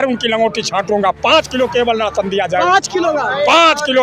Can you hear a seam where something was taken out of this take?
no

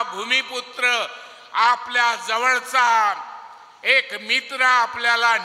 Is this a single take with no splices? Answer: yes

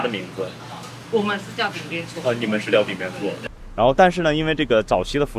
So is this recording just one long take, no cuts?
no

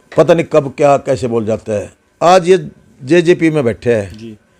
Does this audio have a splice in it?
no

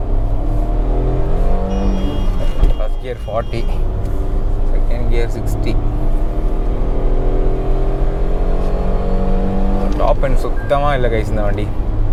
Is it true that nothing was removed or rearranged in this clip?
yes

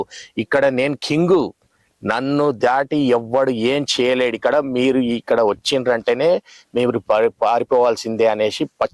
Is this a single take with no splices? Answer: yes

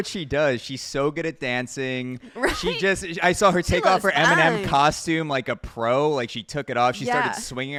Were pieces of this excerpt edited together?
no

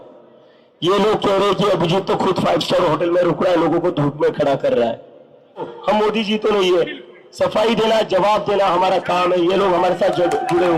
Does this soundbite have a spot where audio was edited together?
yes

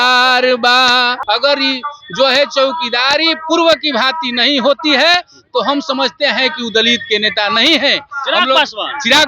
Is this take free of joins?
no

